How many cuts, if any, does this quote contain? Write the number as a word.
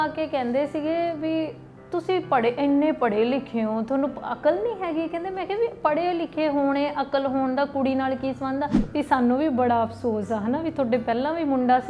one